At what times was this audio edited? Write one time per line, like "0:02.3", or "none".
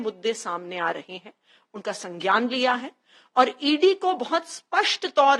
none